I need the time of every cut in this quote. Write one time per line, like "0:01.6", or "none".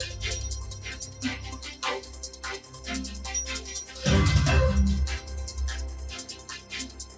0:01.9